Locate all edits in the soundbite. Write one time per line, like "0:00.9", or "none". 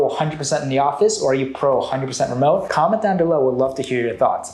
none